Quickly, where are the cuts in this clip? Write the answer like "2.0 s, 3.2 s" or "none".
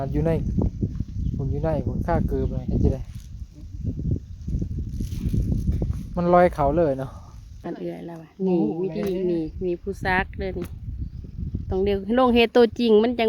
7.6 s

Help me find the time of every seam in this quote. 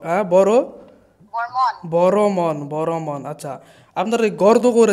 none

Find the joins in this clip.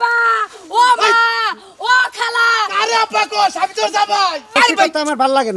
4.5 s

